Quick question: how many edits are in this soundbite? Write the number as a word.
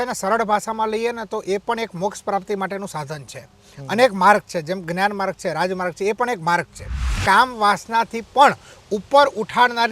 one